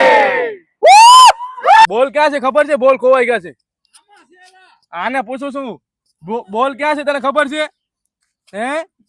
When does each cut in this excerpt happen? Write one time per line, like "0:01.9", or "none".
0:01.6